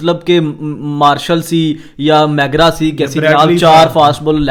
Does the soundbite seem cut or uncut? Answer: uncut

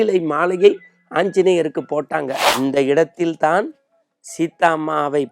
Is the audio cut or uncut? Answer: cut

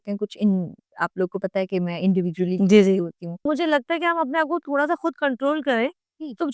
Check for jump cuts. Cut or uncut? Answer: cut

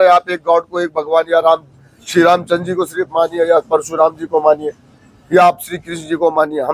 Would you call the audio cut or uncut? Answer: uncut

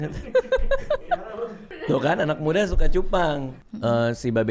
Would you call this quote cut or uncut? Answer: cut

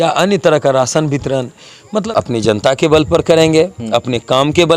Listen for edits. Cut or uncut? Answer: cut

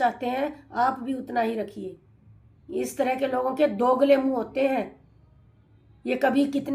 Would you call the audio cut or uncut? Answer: uncut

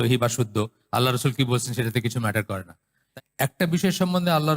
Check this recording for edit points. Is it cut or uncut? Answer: cut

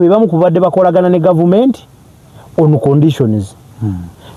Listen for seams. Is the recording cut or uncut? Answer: uncut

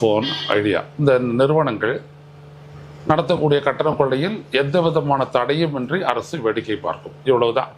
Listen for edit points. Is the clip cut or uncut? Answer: uncut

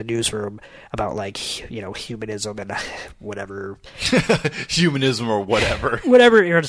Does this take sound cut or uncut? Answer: uncut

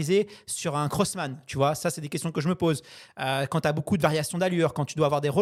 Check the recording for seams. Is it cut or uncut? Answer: uncut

